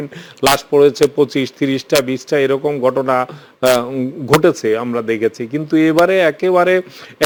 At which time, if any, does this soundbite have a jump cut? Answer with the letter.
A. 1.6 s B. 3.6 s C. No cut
C